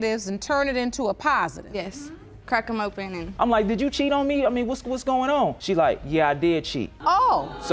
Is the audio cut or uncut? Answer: cut